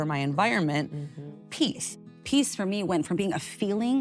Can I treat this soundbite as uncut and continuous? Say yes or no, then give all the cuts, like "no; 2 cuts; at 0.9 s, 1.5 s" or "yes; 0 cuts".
no; 1 cut; at 2.0 s